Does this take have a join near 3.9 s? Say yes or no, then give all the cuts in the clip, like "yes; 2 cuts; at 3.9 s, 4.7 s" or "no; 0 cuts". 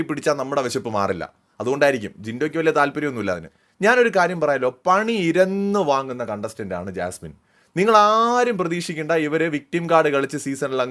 no; 0 cuts